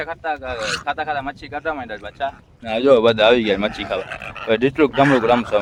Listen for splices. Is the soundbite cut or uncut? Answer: uncut